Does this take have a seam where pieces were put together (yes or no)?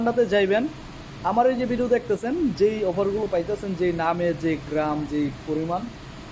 no